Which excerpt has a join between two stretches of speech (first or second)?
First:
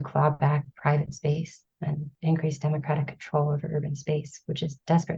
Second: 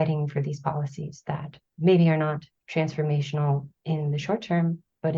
second